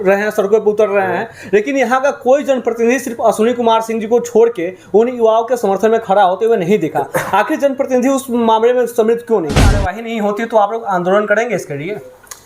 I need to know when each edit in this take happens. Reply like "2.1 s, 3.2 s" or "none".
9.9 s